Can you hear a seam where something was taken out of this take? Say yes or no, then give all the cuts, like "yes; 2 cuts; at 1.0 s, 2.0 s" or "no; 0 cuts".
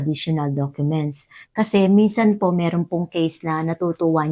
no; 0 cuts